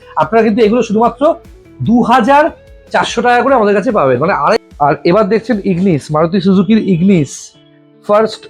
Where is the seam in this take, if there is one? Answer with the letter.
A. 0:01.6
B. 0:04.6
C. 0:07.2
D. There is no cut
B